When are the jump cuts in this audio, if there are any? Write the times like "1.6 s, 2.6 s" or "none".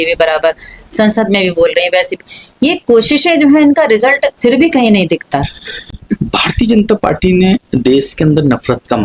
none